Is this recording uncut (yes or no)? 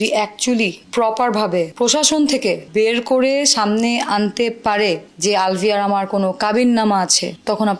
no